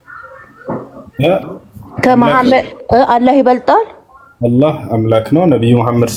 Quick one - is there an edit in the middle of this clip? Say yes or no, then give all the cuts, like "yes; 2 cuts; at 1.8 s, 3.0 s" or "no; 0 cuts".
no; 0 cuts